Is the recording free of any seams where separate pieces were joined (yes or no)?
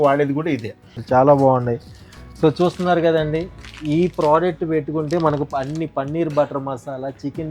no